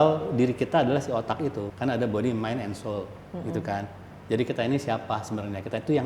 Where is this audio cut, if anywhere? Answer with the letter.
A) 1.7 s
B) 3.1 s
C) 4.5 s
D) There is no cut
A